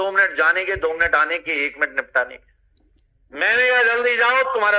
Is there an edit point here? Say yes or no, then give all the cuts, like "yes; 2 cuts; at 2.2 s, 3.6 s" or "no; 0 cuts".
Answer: no; 0 cuts